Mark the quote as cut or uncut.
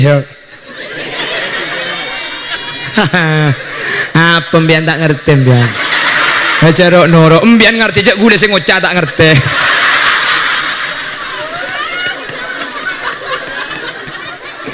uncut